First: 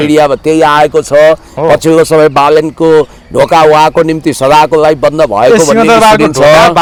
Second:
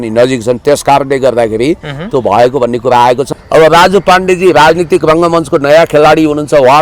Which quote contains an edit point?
second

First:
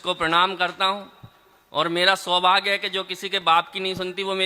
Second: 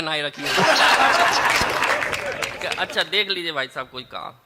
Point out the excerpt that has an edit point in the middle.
second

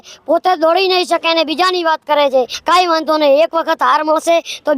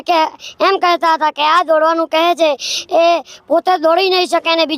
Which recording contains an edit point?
first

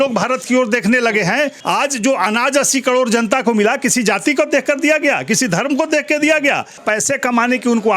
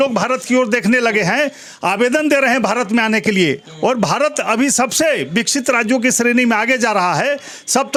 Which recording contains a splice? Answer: first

